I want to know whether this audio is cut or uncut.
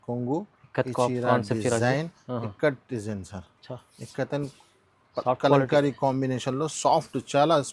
uncut